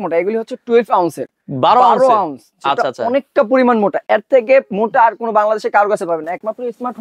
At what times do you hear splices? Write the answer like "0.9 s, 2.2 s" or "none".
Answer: none